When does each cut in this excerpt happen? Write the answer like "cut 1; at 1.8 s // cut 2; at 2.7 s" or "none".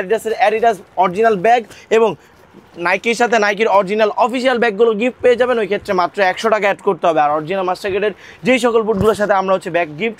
none